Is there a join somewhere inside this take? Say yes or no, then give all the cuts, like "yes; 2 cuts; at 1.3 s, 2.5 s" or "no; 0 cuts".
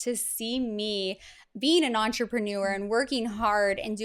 no; 0 cuts